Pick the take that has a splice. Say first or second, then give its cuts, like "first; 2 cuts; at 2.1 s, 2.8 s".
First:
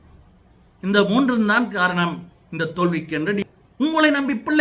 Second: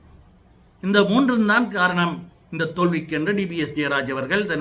first; 1 cut; at 3.5 s